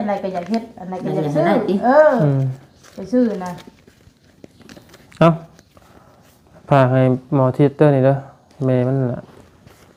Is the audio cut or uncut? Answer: uncut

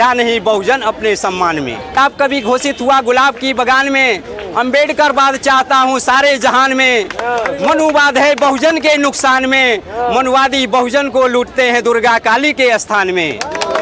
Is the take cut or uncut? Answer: cut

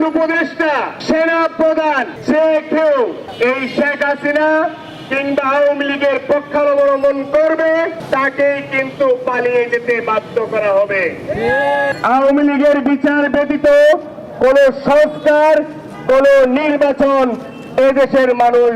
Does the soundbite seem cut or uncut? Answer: cut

